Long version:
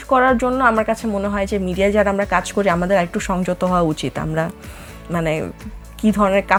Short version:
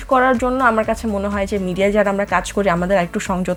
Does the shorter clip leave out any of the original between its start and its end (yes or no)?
no